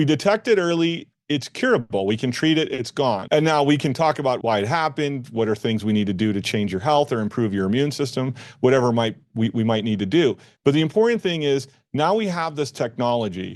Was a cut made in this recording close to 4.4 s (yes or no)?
yes